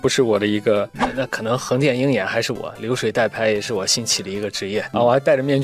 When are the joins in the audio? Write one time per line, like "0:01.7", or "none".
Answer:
0:00.9